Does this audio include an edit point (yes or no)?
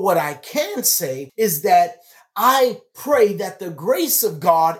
yes